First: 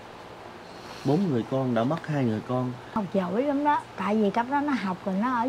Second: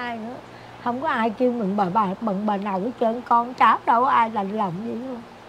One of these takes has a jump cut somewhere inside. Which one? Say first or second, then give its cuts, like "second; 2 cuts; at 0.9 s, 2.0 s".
first; 1 cut; at 2.9 s